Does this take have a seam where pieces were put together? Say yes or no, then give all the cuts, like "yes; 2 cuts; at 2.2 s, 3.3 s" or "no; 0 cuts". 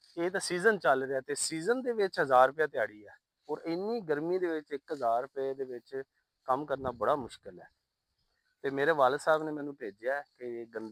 no; 0 cuts